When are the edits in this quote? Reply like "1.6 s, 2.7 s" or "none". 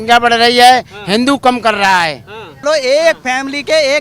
2.6 s